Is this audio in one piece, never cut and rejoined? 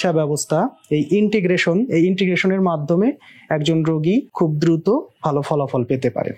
no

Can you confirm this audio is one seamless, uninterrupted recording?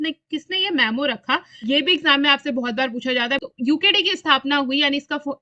no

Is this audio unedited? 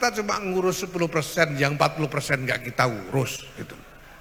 yes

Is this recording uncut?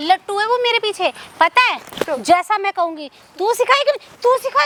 yes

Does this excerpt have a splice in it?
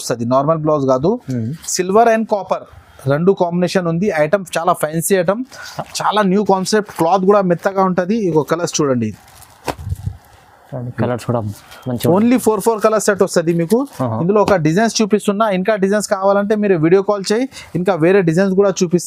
no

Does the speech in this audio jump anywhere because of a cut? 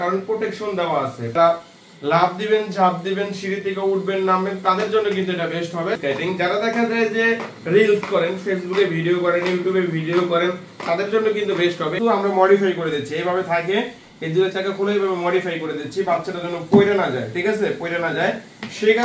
yes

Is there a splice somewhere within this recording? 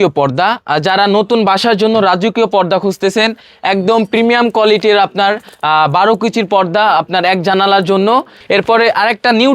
yes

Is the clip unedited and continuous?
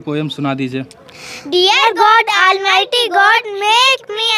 yes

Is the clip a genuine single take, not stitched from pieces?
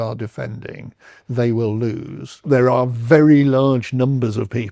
no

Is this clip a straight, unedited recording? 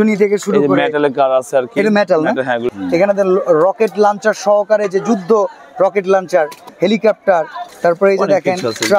no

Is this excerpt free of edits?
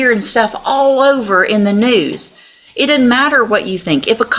yes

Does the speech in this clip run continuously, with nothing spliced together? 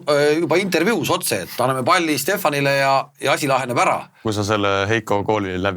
no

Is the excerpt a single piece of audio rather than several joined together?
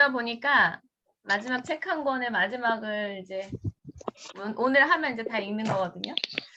yes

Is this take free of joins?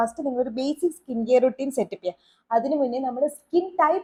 yes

